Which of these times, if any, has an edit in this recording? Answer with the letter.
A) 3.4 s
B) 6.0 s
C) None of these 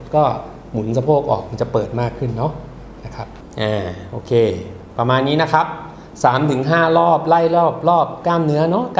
A